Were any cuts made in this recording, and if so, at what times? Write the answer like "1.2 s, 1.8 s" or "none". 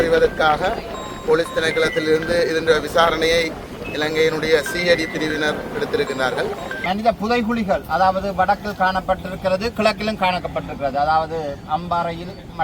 6.7 s

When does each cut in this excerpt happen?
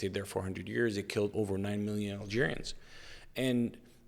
none

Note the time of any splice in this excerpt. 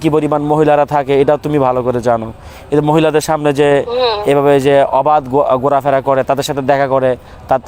none

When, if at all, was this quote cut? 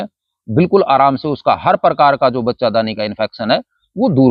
none

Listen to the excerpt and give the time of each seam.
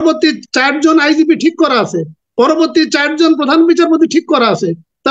none

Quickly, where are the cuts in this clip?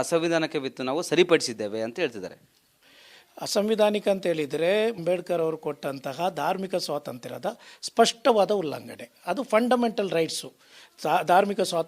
5.0 s

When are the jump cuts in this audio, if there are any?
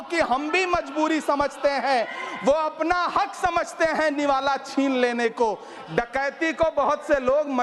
none

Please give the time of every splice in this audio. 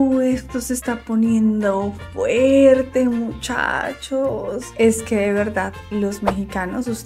none

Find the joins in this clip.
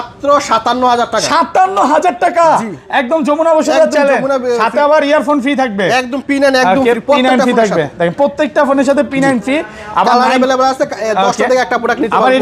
none

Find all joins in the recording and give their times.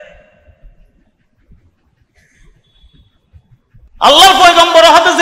3.9 s

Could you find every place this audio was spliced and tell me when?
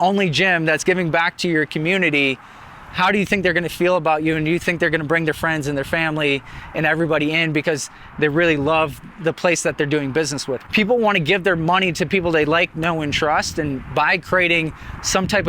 10.5 s

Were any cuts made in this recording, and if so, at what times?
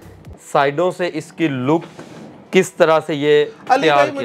none

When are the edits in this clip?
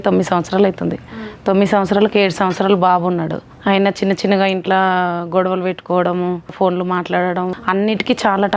3.4 s, 6.5 s, 7.6 s

